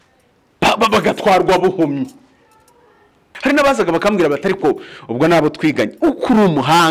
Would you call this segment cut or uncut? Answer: cut